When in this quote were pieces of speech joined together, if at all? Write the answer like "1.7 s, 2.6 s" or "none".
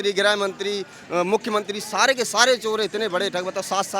none